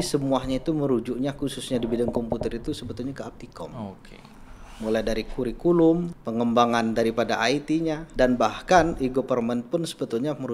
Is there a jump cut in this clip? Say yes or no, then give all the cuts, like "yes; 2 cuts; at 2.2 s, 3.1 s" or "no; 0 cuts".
yes; 2 cuts; at 6.2 s, 8.0 s